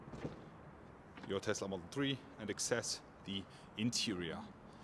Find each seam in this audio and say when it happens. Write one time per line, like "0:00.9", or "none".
none

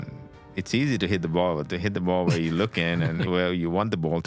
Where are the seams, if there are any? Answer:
none

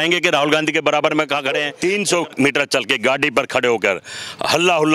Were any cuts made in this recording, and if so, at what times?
0:01.7

